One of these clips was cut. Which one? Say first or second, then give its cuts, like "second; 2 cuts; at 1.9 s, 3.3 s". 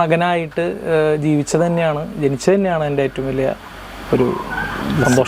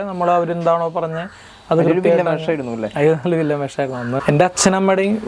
second; 1 cut; at 4.2 s